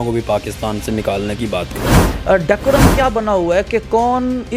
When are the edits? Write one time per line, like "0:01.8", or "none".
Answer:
0:02.0